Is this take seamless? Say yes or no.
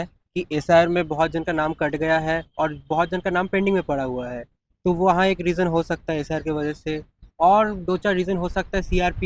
yes